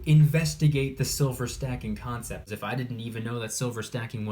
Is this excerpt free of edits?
no; 1 cut; at 2.5 s

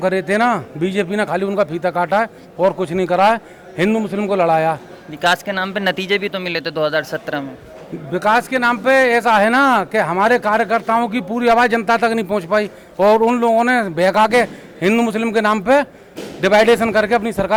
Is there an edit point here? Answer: no; 0 cuts

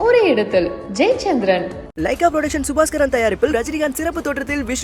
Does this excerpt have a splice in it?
no; 0 cuts

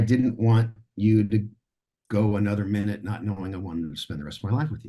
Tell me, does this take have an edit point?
no; 0 cuts

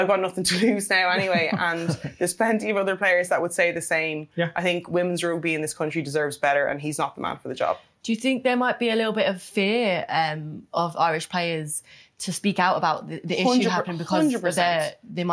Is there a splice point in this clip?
no; 0 cuts

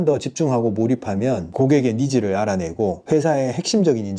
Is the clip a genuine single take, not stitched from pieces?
no; 2 cuts; at 1.5 s, 3.0 s

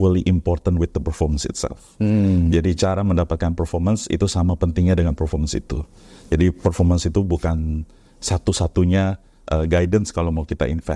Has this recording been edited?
no; 0 cuts

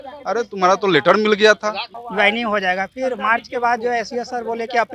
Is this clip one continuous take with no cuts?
no; 1 cut; at 2.0 s

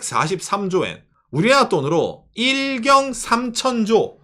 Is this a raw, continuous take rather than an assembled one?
no; 1 cut; at 1.1 s

